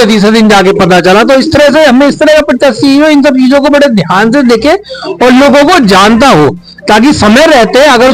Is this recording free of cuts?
yes; 0 cuts

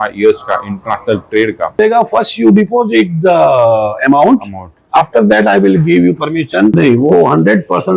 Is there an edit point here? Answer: yes; 2 cuts; at 1.8 s, 6.7 s

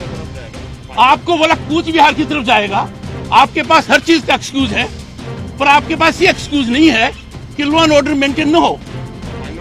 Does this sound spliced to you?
no; 0 cuts

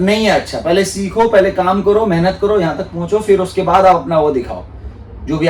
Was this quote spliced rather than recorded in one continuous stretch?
no; 0 cuts

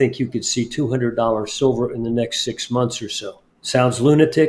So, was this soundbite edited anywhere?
no; 0 cuts

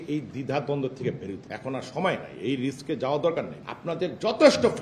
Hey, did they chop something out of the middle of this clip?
yes; 2 cuts; at 1.5 s, 3.6 s

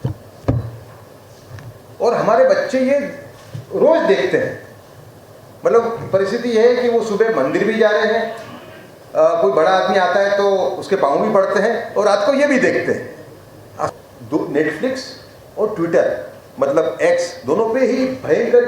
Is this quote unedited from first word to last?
no; 1 cut; at 13.9 s

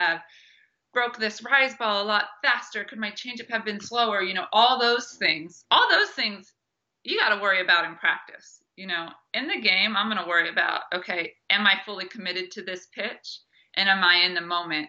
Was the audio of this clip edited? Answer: no; 0 cuts

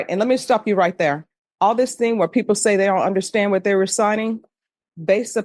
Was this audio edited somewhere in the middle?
no; 0 cuts

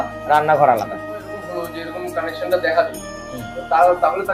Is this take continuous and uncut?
no; 1 cut; at 1.3 s

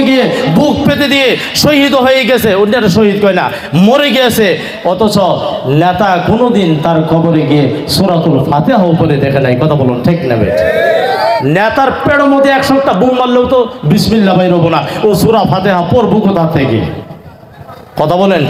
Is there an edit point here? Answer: no; 0 cuts

